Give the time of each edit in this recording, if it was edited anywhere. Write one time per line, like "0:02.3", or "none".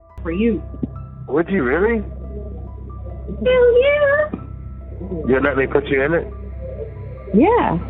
none